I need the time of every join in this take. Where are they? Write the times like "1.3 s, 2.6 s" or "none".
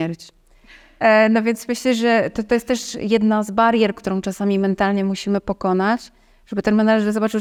none